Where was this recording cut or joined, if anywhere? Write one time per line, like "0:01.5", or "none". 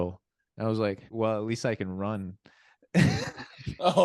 0:01.1